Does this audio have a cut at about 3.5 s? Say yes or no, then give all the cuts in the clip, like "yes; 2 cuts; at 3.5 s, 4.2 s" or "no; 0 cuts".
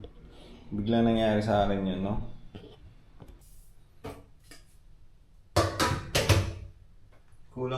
yes; 1 cut; at 3.5 s